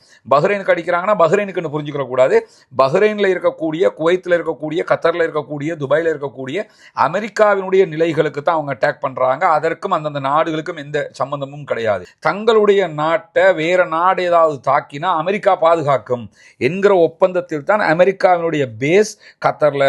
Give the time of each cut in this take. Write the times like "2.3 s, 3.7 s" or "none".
12.0 s